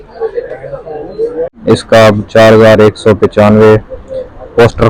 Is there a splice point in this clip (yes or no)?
yes